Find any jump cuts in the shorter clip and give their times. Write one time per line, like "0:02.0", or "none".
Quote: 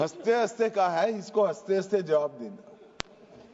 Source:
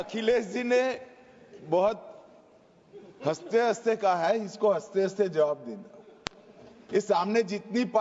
none